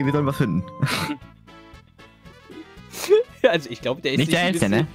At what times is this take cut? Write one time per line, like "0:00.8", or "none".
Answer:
0:01.1